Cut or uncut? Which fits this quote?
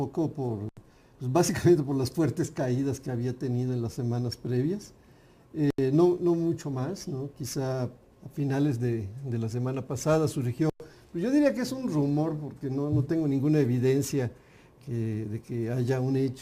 cut